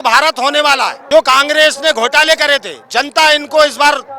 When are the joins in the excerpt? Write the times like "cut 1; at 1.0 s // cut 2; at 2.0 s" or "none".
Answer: cut 1; at 1.0 s